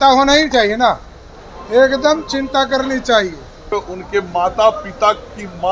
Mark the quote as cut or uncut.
cut